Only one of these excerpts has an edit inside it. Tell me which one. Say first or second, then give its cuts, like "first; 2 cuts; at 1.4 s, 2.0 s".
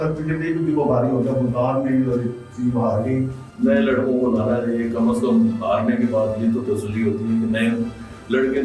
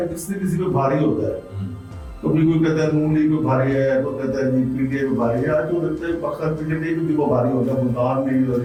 first; 1 cut; at 3.4 s